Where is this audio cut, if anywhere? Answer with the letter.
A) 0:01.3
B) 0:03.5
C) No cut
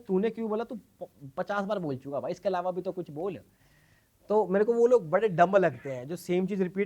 C